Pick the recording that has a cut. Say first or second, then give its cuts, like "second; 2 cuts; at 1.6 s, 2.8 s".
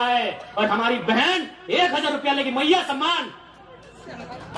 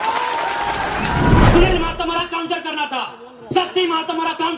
second; 1 cut; at 1.5 s